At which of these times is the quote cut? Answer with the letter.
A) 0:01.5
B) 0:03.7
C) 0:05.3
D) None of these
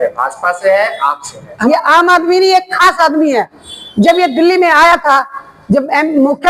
A